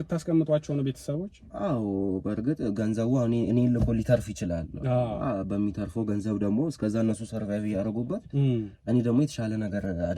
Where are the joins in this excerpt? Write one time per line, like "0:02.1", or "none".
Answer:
none